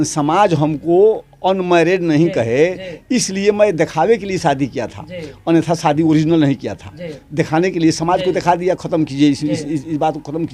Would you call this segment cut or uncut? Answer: uncut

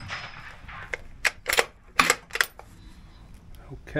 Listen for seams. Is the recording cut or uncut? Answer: uncut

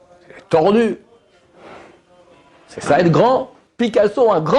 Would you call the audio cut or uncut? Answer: cut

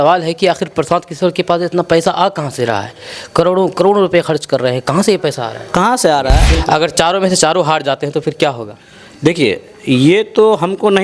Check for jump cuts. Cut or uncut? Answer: cut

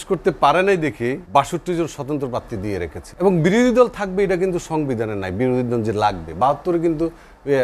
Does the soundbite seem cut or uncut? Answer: cut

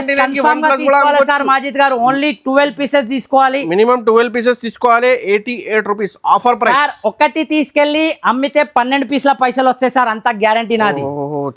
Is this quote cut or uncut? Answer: uncut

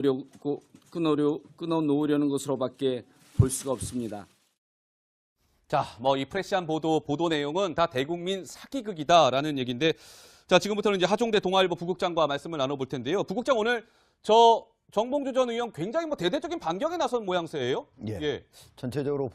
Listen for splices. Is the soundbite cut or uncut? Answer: cut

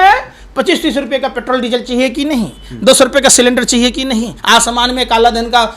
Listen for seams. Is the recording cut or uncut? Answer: cut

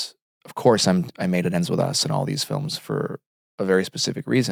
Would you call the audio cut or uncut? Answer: uncut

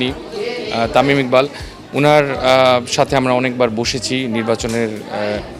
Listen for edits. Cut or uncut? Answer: uncut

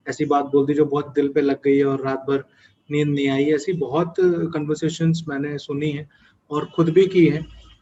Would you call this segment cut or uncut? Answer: uncut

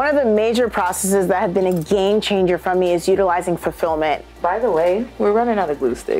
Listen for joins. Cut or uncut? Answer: cut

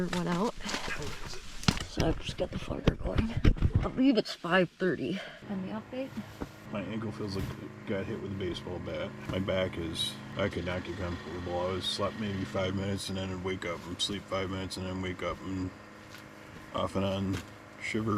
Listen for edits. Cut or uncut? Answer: cut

